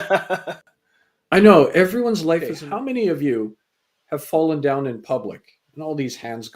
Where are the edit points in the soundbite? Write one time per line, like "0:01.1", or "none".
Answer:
0:02.5